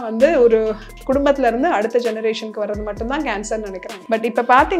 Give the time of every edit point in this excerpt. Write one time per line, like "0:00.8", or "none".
0:03.9